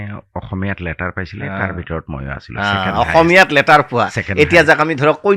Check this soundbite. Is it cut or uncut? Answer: uncut